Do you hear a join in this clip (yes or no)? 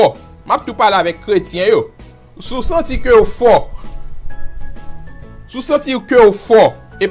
no